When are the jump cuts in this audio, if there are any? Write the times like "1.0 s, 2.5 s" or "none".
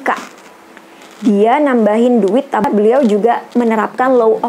2.6 s